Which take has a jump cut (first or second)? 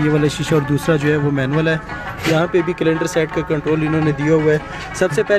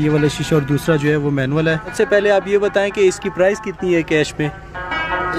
second